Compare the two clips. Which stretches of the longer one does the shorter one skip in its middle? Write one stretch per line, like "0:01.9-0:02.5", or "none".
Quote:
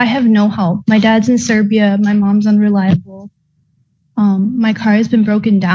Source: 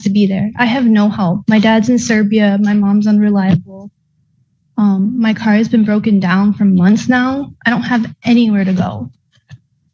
none